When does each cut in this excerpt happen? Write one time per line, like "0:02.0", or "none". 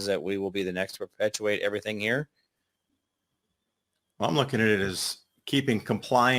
0:02.8

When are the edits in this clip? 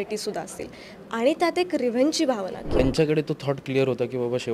0:02.8

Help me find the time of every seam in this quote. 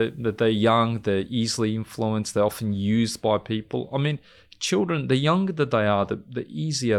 none

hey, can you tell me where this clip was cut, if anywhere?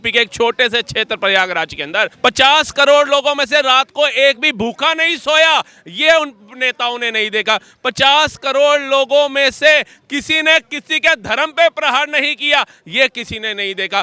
0:02.1

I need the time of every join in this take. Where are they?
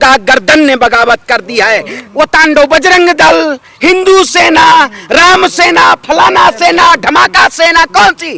0:02.0

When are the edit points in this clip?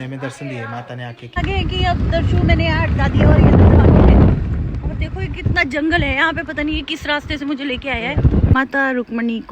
0:01.4
0:08.5

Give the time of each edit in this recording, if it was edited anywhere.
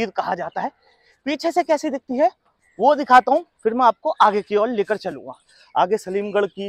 none

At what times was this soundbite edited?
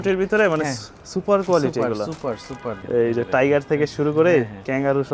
0:02.7

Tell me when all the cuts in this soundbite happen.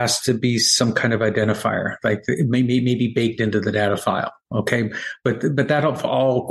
none

